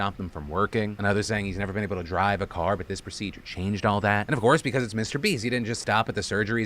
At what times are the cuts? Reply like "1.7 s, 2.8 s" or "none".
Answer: 2.8 s